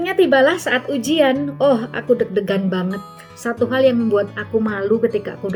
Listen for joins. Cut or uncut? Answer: uncut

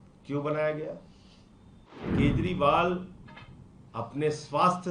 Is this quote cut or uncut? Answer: cut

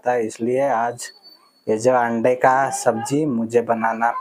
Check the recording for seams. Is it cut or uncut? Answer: uncut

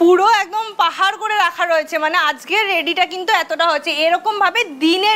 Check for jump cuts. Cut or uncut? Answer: uncut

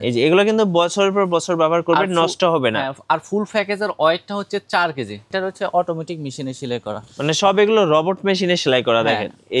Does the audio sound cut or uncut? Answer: cut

